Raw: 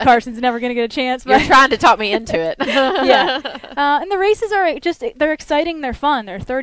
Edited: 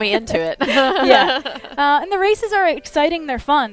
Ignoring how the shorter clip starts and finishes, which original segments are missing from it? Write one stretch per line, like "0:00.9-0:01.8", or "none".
0:04.8-0:05.4